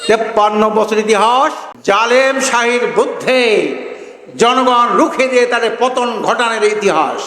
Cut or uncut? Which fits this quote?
cut